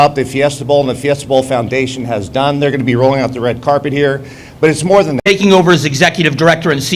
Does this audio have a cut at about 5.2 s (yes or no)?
yes